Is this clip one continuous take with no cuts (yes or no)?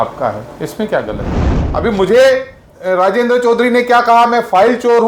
no